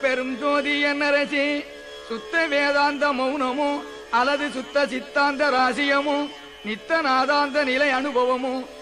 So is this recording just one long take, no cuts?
yes; 0 cuts

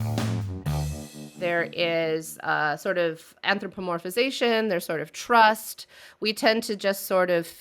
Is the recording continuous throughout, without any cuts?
no; 1 cut; at 1.4 s

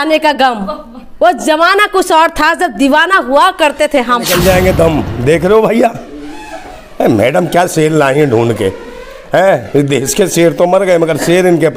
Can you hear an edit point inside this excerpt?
yes; 1 cut; at 4.3 s

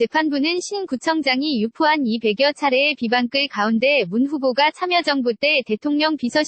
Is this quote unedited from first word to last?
no; 1 cut; at 0.9 s

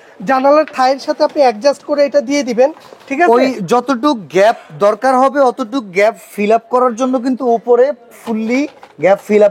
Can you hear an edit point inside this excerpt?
no; 0 cuts

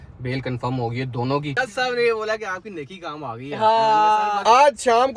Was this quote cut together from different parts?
yes; 2 cuts; at 1.6 s, 4.4 s

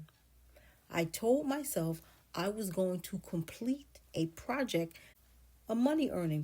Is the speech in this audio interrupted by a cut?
yes; 1 cut; at 5.1 s

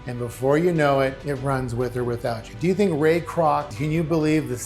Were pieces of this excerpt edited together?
yes; 2 cuts; at 1.2 s, 3.7 s

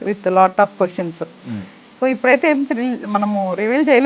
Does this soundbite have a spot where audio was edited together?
yes; 1 cut; at 1.7 s

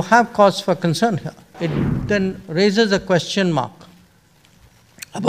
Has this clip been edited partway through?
yes; 1 cut; at 1.6 s

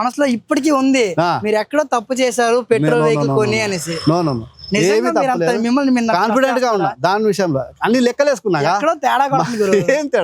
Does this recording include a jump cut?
no; 0 cuts

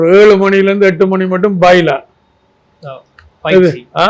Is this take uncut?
yes; 0 cuts

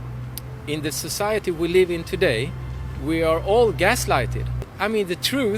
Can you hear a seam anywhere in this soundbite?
yes; 1 cut; at 4.7 s

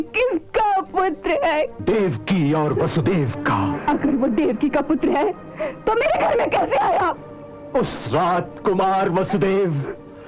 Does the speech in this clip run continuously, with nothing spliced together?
no; 2 cuts; at 1.8 s, 3.7 s

